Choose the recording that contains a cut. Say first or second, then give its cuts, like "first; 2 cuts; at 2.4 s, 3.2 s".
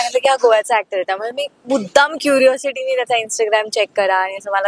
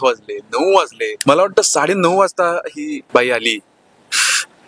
second; 2 cuts; at 1.2 s, 3.0 s